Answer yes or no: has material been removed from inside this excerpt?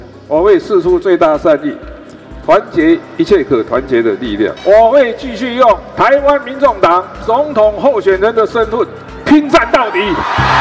yes